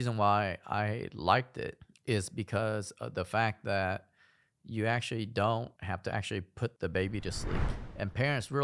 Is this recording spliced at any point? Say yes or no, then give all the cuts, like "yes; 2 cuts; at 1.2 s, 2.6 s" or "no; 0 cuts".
yes; 1 cut; at 7.6 s